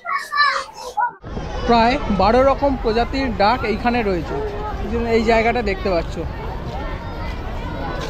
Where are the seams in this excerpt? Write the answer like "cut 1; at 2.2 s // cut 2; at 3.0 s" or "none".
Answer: cut 1; at 1.3 s